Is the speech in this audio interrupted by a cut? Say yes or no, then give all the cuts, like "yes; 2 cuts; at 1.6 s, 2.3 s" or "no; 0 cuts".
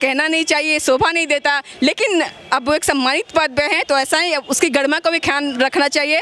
no; 0 cuts